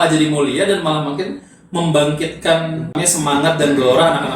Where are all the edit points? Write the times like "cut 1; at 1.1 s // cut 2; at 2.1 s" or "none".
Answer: cut 1; at 3.0 s

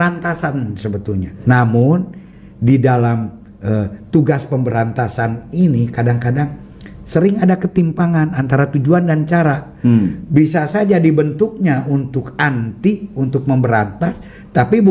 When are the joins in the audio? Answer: cut 1; at 1.4 s

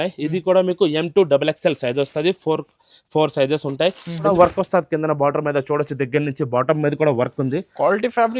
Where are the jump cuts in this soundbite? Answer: cut 1; at 4.3 s

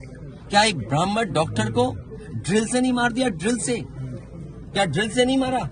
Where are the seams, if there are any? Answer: none

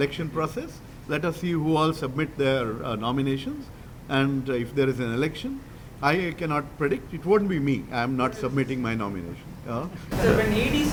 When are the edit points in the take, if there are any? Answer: none

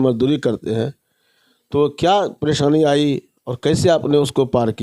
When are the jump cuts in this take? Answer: none

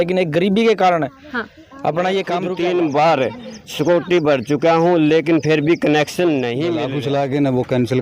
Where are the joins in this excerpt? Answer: cut 1; at 2.5 s // cut 2; at 6.9 s

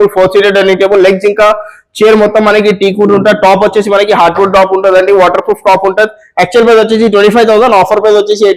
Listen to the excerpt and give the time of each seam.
none

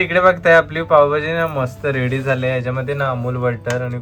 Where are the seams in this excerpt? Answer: none

